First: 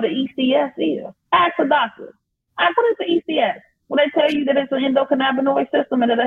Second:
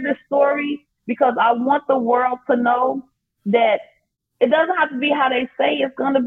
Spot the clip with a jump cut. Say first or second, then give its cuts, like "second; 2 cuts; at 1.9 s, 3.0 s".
second; 1 cut; at 4.0 s